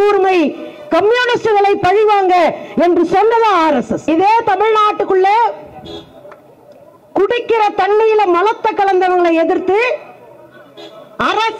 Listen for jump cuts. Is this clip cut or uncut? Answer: cut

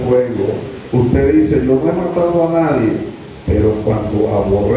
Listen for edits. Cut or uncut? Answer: uncut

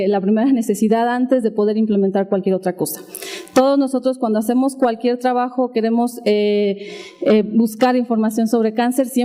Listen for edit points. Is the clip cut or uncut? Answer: uncut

